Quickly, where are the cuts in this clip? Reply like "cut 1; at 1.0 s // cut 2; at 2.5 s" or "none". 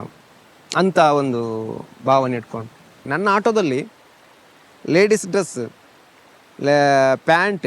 cut 1; at 3.0 s